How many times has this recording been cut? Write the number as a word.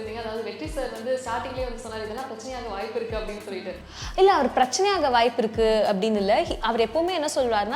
one